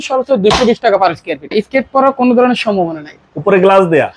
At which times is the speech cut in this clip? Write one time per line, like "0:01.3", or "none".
0:01.5